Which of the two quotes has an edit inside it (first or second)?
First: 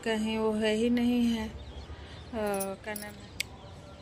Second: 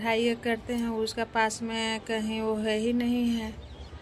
first